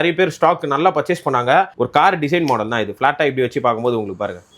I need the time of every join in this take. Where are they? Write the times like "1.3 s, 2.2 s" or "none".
1.7 s